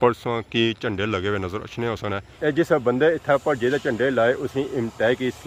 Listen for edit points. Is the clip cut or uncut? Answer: uncut